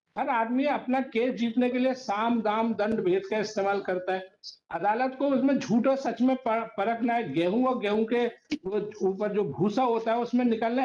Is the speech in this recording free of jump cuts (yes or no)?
yes